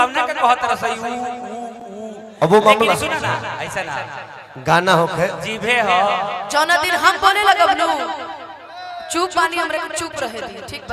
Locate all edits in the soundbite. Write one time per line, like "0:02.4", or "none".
none